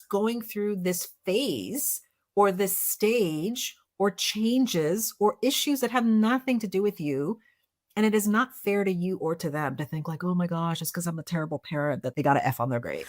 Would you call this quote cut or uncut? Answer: cut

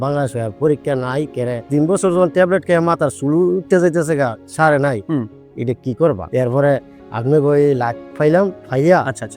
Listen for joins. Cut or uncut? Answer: uncut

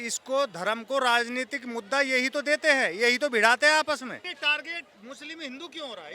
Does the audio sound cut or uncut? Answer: cut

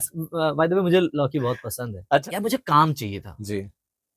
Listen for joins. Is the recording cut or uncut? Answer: cut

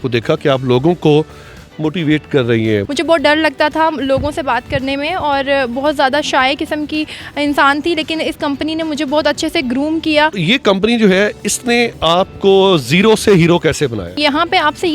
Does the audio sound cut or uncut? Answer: cut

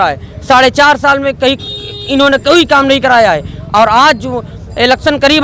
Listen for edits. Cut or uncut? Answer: uncut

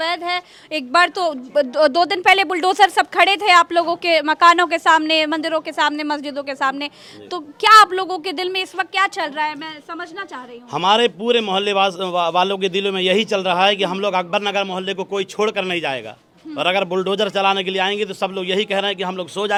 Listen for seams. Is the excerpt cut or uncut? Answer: uncut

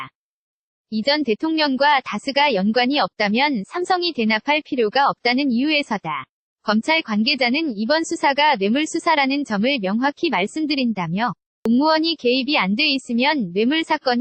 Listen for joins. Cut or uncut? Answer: cut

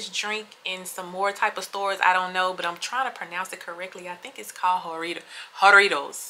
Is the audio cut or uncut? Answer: uncut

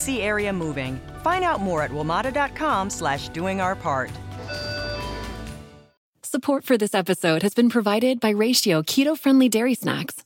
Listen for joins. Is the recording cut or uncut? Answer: cut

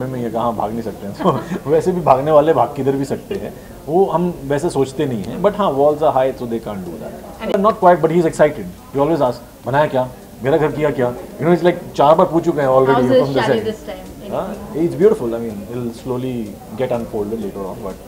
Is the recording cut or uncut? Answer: cut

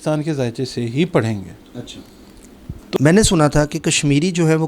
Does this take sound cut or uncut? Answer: cut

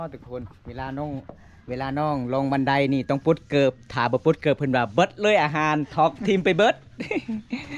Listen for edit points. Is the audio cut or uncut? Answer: uncut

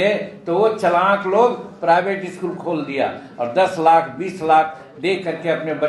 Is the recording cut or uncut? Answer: uncut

